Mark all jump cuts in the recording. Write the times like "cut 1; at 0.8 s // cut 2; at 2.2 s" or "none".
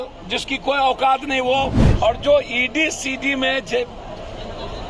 cut 1; at 1.8 s